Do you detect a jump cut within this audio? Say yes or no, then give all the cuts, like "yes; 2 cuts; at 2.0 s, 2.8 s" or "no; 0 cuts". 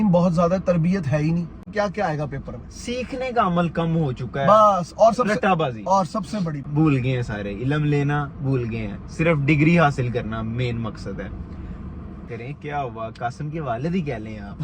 yes; 3 cuts; at 1.7 s, 6.7 s, 12.2 s